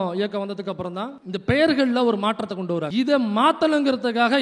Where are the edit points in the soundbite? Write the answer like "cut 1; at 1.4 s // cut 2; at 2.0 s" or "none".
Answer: cut 1; at 2.9 s